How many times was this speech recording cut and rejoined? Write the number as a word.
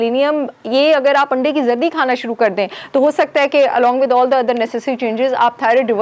zero